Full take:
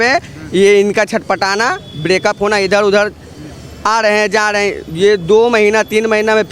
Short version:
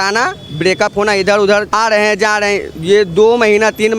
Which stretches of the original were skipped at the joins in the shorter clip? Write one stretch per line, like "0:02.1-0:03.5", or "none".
0:03.1-0:03.8